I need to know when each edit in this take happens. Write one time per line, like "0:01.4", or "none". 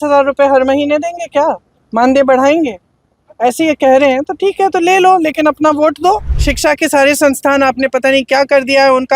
0:06.3